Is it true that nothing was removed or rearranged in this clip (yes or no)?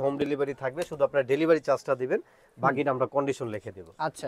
yes